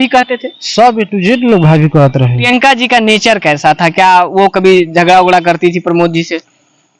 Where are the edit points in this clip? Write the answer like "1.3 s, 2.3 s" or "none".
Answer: 2.4 s